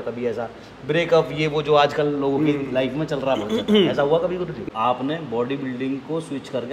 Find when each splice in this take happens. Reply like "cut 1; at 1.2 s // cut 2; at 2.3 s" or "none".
cut 1; at 4.6 s